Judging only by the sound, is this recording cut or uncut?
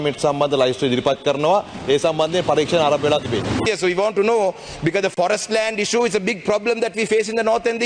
cut